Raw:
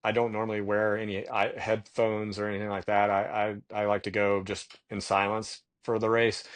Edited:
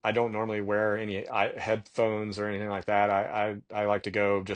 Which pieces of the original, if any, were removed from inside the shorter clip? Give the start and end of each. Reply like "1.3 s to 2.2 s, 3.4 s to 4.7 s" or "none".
none